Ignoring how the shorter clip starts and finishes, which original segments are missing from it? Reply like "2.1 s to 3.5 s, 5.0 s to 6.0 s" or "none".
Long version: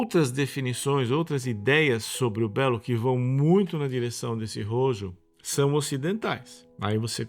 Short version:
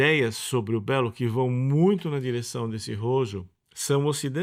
none